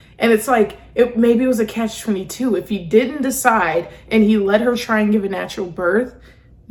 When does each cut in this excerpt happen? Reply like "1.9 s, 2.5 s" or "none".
none